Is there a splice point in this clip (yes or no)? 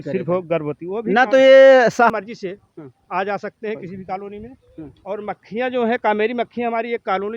yes